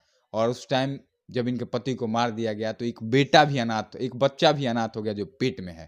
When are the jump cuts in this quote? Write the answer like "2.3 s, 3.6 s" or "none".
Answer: none